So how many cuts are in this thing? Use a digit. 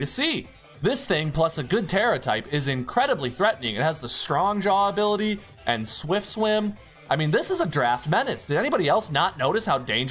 0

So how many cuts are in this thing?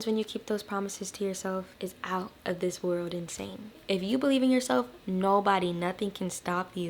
2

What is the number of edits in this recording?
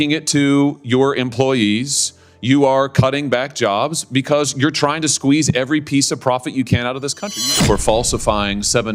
1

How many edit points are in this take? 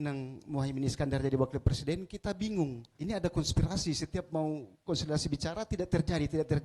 1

